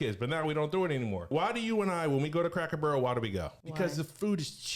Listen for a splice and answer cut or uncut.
cut